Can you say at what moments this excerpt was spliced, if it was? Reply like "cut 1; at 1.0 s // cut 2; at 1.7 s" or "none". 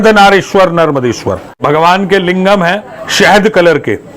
cut 1; at 1.6 s